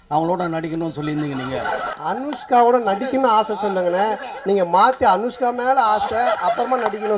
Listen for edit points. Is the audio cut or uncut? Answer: cut